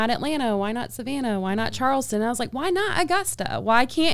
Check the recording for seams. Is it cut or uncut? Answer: uncut